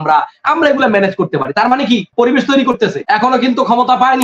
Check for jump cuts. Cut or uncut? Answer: cut